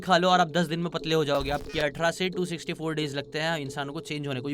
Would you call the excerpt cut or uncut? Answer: cut